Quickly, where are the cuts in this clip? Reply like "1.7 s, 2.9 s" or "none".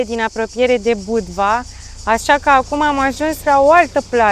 none